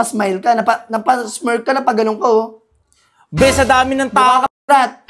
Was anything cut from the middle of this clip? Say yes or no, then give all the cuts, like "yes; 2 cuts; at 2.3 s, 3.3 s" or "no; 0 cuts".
no; 0 cuts